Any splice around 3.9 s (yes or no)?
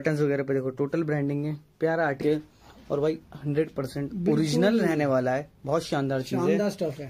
no